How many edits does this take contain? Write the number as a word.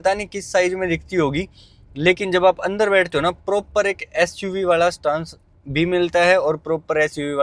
zero